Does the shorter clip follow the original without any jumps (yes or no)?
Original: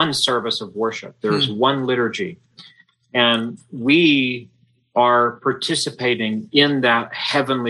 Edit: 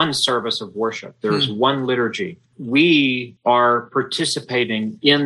no